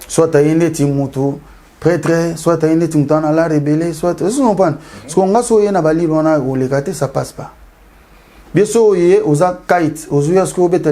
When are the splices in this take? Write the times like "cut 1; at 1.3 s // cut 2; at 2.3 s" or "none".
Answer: none